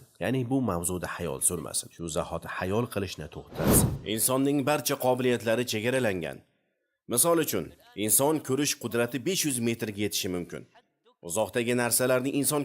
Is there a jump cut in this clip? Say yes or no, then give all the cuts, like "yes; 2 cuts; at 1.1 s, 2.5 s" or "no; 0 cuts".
yes; 1 cut; at 3.9 s